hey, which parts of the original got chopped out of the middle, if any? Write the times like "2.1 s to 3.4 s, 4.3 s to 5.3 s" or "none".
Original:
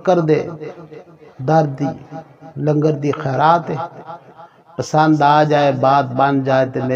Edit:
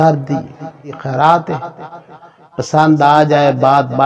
2.5 s to 3.2 s